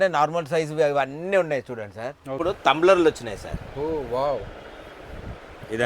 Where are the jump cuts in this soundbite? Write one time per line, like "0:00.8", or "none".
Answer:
0:02.4